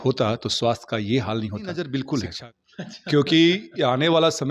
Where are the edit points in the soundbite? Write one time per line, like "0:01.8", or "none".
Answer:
0:02.0